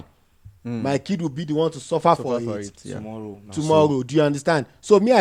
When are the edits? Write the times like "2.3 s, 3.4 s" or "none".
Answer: none